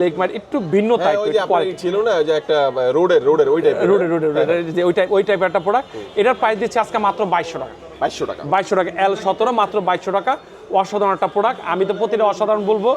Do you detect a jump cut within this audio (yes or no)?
no